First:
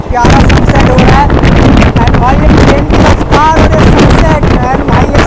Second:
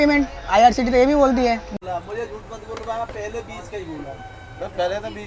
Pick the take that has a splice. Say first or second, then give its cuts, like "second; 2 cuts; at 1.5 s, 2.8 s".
second; 1 cut; at 1.7 s